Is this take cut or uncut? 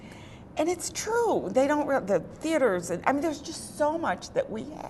uncut